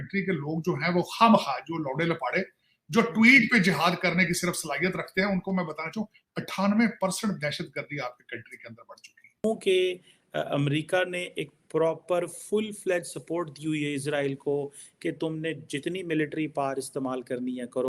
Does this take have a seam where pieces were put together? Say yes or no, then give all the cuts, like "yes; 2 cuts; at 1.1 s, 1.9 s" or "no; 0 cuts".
yes; 1 cut; at 9.4 s